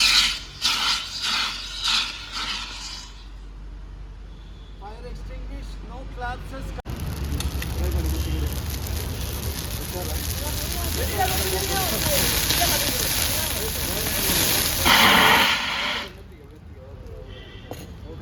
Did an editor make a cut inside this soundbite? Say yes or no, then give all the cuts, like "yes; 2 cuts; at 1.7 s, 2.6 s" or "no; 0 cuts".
no; 0 cuts